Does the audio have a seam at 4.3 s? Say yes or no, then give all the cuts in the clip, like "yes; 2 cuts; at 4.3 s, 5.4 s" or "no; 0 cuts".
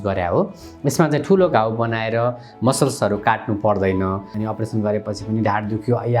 yes; 1 cut; at 4.3 s